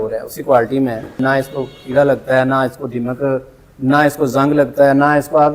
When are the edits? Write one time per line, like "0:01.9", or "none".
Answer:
0:01.2